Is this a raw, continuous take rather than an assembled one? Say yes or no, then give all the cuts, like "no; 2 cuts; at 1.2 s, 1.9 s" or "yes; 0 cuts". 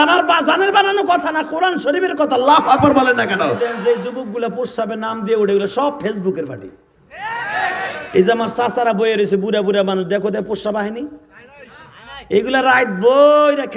no; 1 cut; at 3.4 s